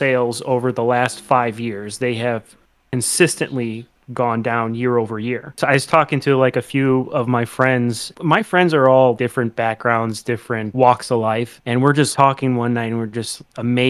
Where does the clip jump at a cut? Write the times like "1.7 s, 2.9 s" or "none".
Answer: 5.6 s, 8.1 s, 9.2 s, 10.7 s, 12.0 s